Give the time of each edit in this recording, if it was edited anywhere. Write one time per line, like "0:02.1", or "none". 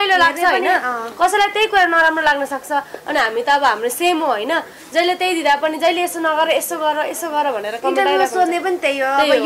none

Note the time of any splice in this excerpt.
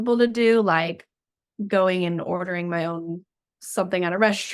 none

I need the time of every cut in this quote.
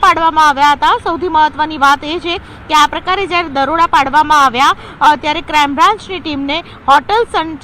none

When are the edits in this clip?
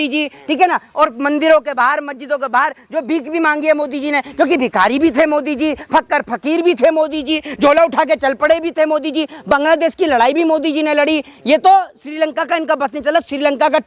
none

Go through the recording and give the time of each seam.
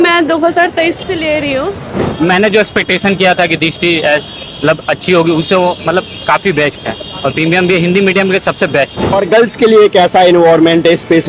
0:02.0
0:09.1

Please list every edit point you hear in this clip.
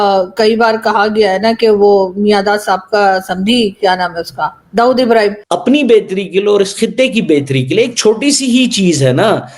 0:05.4

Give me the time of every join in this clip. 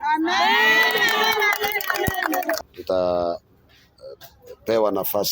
0:02.6

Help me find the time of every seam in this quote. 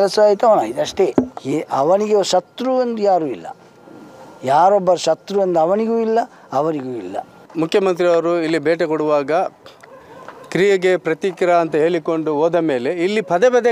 0:01.4
0:07.4

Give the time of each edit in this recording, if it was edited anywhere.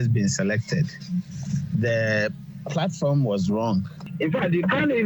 0:04.0

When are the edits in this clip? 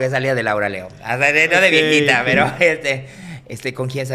none

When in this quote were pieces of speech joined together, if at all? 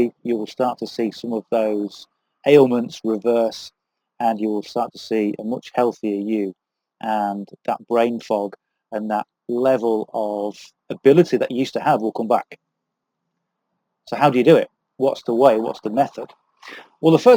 none

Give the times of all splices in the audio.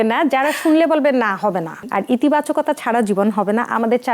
0:01.8

